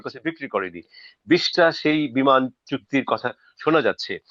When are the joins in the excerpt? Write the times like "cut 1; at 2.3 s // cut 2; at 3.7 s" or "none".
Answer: none

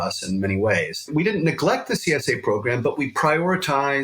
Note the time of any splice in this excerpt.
cut 1; at 1.0 s

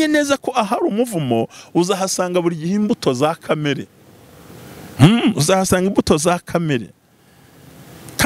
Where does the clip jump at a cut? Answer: none

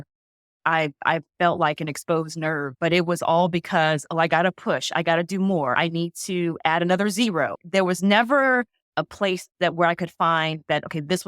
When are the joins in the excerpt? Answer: cut 1; at 2.7 s // cut 2; at 5.8 s // cut 3; at 7.6 s // cut 4; at 8.8 s

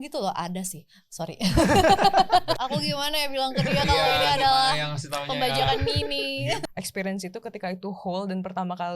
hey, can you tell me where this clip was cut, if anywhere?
cut 1; at 2.6 s // cut 2; at 6.6 s

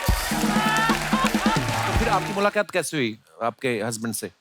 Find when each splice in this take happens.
cut 1; at 2.0 s

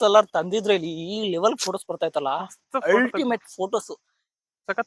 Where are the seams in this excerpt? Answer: none

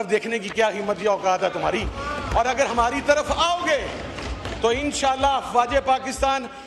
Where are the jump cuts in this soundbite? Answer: none

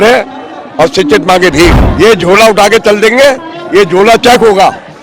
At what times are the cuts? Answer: cut 1; at 1.8 s

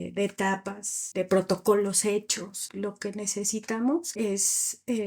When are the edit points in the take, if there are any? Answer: cut 1; at 1.0 s // cut 2; at 2.6 s // cut 3; at 4.1 s

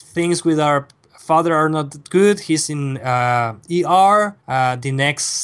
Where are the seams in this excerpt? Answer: cut 1; at 4.4 s

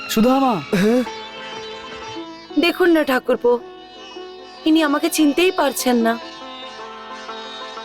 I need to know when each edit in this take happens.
cut 1; at 2.2 s

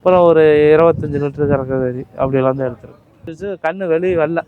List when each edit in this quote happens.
cut 1; at 3.3 s

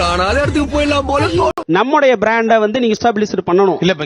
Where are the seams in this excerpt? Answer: cut 1; at 1.6 s // cut 2; at 3.0 s

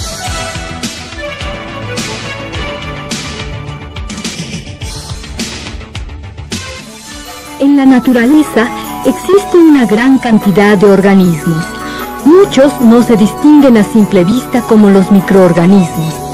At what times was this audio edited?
cut 1; at 9.2 s

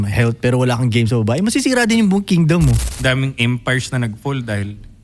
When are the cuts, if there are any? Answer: cut 1; at 2.9 s

